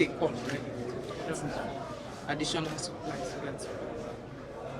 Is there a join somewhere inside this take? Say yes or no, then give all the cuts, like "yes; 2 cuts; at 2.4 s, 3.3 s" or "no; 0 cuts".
no; 0 cuts